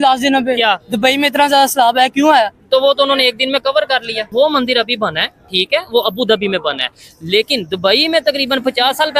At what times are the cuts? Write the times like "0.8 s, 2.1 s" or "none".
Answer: 4.2 s